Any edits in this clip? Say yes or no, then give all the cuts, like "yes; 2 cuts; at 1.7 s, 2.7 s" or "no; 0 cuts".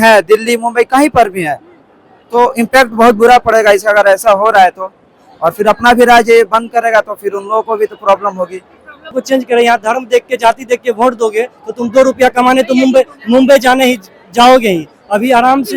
yes; 1 cut; at 9.2 s